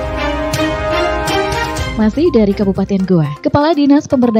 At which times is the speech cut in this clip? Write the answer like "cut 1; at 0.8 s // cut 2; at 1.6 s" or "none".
none